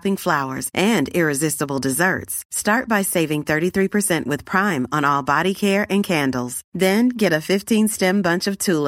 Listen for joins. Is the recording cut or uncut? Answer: uncut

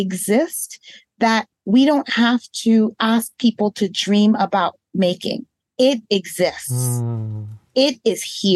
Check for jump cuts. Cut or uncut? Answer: uncut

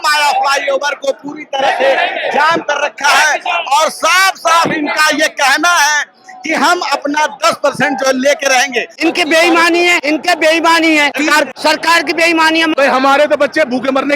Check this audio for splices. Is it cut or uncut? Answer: cut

